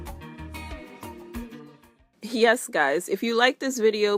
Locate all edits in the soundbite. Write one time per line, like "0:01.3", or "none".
0:01.5